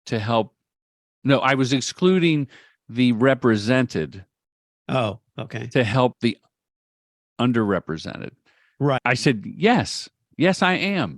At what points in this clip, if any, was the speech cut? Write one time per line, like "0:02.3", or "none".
0:09.1